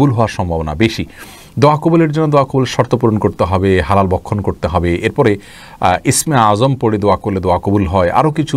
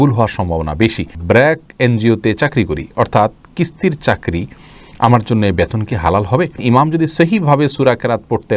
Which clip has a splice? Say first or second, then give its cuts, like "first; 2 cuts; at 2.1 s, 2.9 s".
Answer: second; 2 cuts; at 1.1 s, 6.6 s